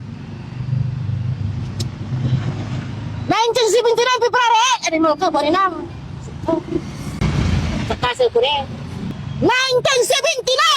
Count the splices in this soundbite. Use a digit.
1